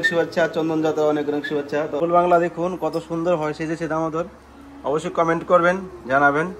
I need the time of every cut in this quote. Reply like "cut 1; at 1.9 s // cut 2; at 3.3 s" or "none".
cut 1; at 2.0 s